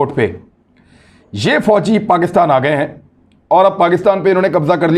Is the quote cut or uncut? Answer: uncut